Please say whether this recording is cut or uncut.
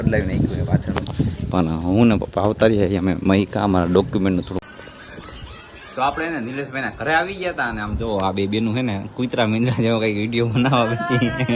cut